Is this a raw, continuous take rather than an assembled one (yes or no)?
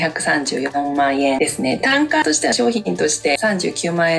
yes